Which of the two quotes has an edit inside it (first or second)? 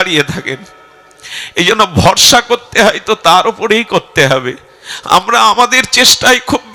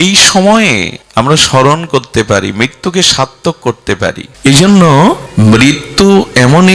second